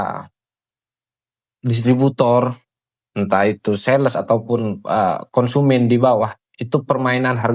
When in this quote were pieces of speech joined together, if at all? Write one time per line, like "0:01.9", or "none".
none